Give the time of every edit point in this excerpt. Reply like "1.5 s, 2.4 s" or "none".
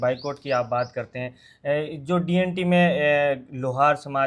none